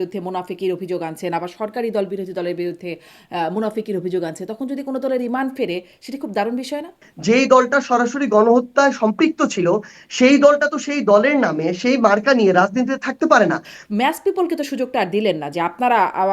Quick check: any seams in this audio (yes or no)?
yes